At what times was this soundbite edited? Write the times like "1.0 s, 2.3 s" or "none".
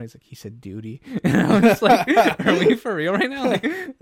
none